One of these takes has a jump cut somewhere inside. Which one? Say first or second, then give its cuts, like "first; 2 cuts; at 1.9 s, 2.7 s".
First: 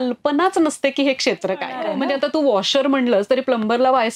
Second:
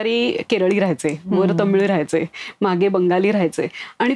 first; 1 cut; at 1.7 s